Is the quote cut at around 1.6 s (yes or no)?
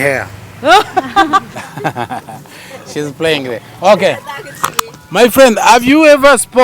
yes